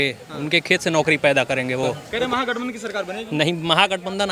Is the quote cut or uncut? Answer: cut